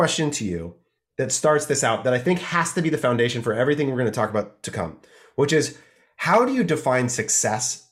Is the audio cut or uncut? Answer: uncut